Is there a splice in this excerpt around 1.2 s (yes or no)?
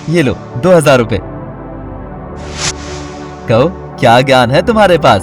yes